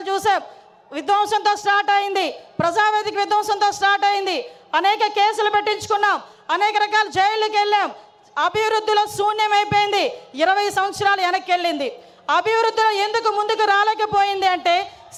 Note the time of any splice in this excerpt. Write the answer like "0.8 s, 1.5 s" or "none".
none